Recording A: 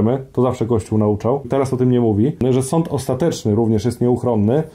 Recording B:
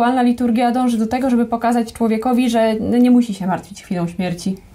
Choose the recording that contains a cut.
A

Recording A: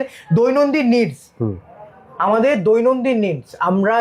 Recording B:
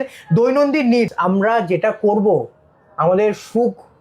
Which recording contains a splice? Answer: B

